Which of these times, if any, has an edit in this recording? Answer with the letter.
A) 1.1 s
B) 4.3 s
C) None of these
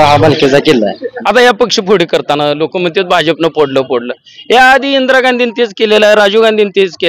A